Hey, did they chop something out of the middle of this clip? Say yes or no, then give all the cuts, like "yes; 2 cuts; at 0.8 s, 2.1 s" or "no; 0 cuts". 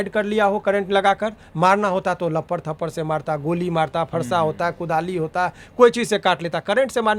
no; 0 cuts